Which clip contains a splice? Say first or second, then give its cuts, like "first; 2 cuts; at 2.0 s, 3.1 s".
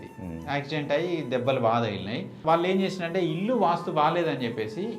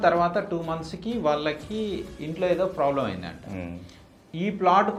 first; 1 cut; at 2.4 s